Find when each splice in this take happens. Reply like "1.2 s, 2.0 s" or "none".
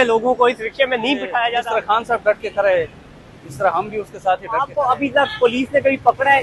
1.5 s, 4.7 s